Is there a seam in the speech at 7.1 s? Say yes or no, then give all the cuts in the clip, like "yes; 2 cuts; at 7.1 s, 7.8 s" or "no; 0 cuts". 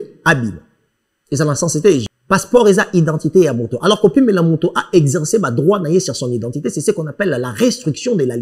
no; 1 cut; at 2.1 s